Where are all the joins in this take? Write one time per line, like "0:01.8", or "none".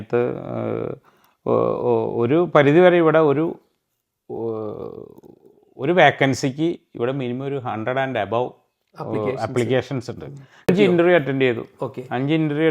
0:10.7